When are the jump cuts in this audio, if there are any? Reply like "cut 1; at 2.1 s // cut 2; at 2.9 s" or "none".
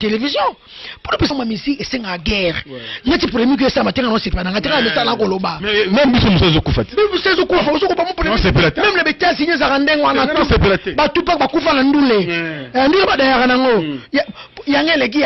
cut 1; at 1.3 s